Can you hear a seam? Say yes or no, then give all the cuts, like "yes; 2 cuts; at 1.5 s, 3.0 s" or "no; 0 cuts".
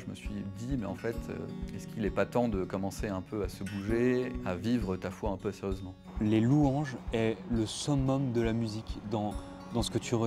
yes; 2 cuts; at 4.3 s, 6.0 s